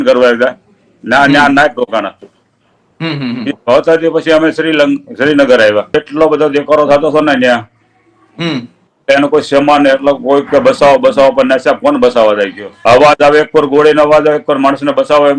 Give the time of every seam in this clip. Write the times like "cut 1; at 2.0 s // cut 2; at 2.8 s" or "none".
cut 1; at 5.9 s // cut 2; at 12.7 s